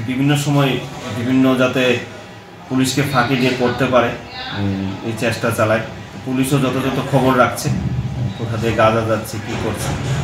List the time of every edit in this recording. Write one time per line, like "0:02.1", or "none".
none